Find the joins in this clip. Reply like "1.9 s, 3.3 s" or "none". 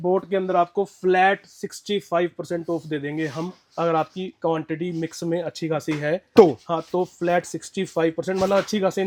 none